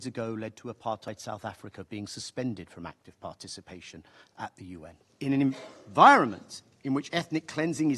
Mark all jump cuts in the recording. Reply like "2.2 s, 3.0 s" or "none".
5.0 s

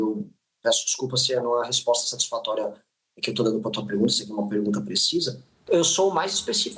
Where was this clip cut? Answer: 5.6 s

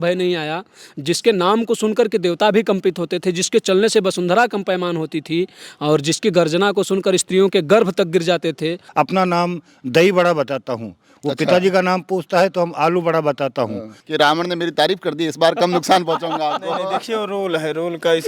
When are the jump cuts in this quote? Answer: 8.8 s, 13.9 s

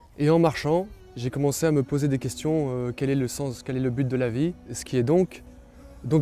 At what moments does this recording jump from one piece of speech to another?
4.8 s

